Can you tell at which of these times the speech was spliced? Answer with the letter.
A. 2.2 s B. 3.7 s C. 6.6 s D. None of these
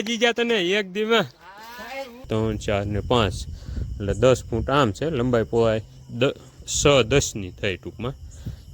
A